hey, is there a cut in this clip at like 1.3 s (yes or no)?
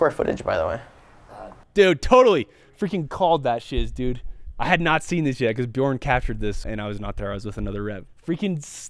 no